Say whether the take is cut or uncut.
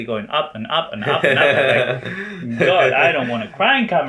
uncut